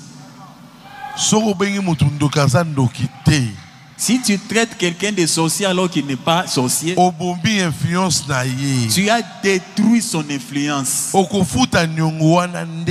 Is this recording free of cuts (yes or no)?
yes